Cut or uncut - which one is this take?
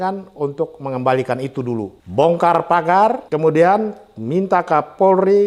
cut